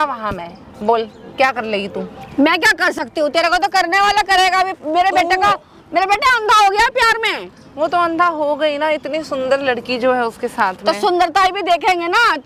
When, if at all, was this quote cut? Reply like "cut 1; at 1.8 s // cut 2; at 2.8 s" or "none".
none